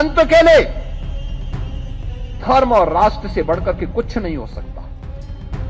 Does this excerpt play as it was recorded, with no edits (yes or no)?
yes